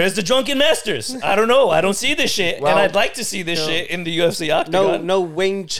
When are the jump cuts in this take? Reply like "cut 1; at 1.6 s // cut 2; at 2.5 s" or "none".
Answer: none